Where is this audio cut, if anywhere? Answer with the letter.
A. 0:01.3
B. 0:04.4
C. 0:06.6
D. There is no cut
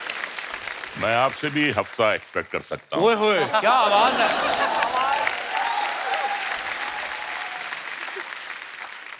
D